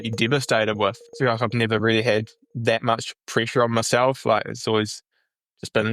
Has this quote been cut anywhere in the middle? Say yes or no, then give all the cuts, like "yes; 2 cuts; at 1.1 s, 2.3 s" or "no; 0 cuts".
yes; 1 cut; at 1.1 s